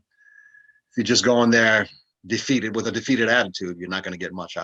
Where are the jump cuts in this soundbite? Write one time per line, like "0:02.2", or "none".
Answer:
none